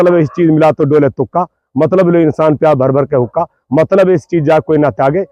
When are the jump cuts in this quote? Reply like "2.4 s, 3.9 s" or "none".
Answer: none